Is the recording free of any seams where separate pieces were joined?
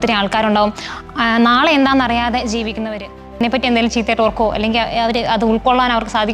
no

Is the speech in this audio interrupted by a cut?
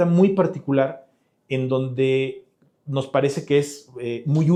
no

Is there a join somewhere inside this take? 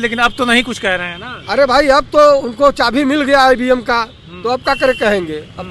no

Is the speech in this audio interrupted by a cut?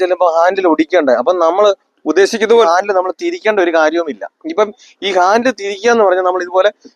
yes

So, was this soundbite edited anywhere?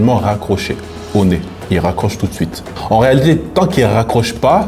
no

